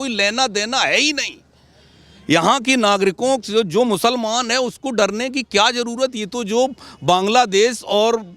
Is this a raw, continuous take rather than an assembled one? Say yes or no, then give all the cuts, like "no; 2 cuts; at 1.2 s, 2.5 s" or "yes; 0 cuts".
yes; 0 cuts